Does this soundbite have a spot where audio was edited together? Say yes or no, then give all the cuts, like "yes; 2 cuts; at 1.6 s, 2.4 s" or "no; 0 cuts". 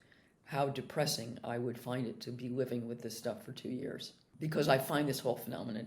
yes; 1 cut; at 4.3 s